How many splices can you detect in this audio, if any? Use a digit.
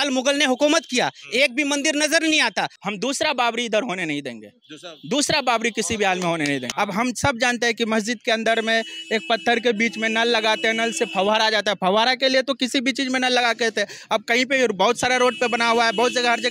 2